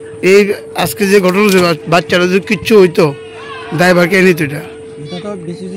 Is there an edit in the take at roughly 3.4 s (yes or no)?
no